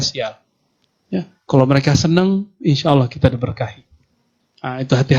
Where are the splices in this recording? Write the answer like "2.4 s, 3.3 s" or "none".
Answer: none